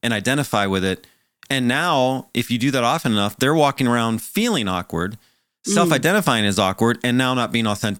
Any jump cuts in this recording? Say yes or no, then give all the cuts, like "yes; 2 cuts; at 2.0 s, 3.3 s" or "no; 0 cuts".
no; 0 cuts